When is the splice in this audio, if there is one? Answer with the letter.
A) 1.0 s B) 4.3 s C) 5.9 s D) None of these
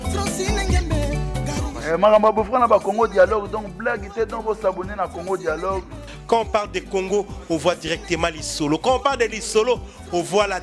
A